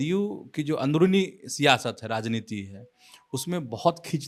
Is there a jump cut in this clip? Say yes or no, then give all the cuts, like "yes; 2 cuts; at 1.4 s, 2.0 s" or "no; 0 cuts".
no; 0 cuts